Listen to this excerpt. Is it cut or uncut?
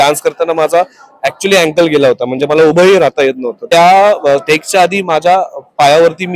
cut